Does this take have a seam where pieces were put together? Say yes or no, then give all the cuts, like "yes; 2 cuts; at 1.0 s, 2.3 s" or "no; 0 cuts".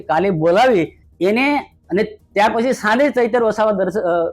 yes; 1 cut; at 1.0 s